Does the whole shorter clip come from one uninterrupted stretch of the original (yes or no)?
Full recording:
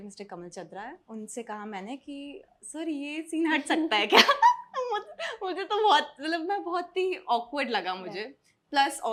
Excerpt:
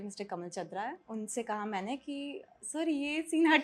yes